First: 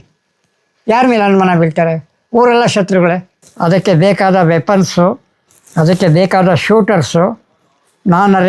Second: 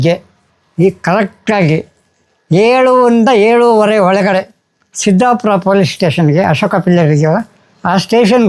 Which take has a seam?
first; 1 cut; at 3.3 s

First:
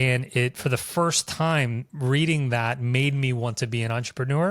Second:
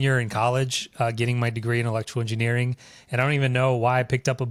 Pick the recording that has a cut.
first; 1 cut; at 1.8 s

